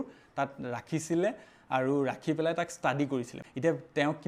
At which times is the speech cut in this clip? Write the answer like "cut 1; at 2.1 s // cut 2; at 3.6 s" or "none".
none